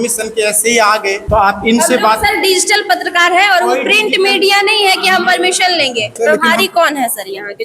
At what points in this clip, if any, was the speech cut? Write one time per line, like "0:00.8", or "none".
0:01.2
0:06.1